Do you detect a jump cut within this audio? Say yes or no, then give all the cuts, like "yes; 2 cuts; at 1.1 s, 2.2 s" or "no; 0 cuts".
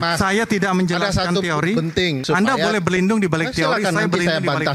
yes; 1 cut; at 2.2 s